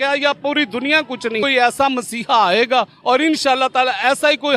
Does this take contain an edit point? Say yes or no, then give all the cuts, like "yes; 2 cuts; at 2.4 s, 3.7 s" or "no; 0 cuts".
yes; 1 cut; at 1.4 s